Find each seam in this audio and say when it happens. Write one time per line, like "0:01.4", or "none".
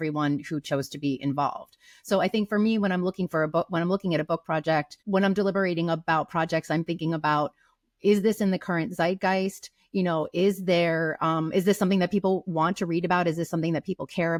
none